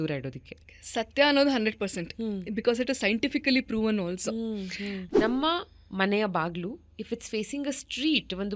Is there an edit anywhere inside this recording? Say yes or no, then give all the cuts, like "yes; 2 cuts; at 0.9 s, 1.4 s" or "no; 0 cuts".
yes; 1 cut; at 5.0 s